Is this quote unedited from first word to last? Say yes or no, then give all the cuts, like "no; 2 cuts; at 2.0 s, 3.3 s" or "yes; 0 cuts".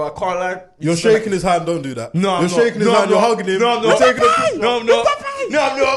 yes; 0 cuts